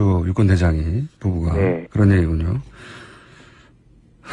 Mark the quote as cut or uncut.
cut